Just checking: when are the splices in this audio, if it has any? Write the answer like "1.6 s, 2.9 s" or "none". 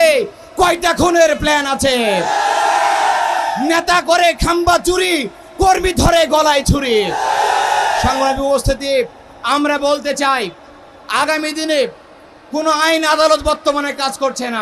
none